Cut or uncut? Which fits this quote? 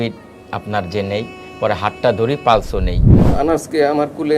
cut